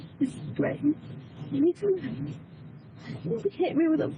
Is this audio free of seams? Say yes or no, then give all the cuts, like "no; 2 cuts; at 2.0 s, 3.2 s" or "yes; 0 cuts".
yes; 0 cuts